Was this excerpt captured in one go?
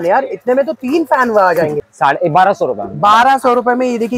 no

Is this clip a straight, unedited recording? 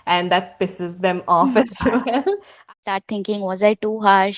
no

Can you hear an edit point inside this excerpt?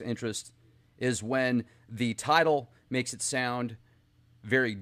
no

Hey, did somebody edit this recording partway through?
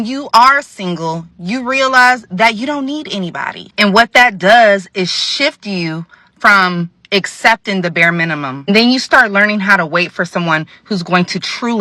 no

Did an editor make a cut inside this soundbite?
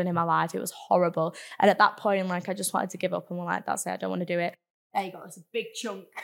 yes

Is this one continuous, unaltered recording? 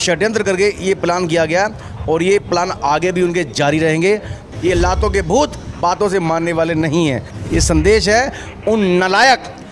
no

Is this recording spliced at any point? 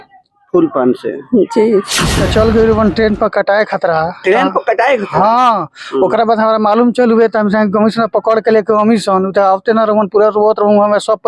yes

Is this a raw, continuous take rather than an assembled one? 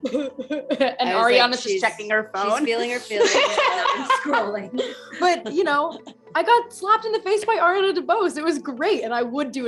yes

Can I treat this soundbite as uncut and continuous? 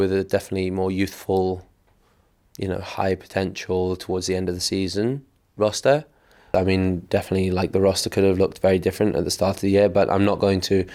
no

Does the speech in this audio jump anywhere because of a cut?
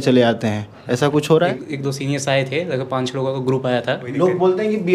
yes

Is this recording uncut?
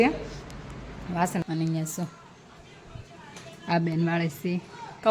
no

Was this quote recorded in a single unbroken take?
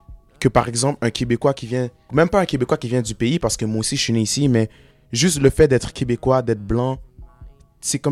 yes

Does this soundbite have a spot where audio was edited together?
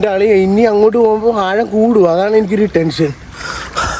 no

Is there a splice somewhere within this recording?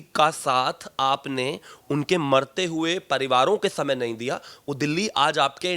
no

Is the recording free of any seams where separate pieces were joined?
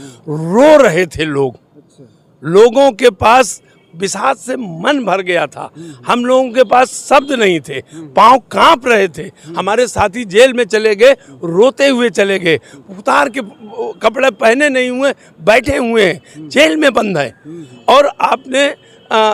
yes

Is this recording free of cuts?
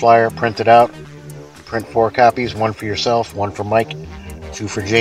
yes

